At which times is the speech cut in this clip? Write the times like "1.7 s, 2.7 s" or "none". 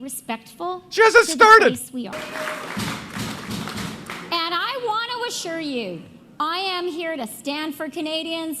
2.2 s